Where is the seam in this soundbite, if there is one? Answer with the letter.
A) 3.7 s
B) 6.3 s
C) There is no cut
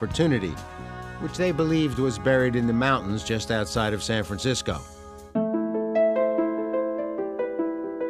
A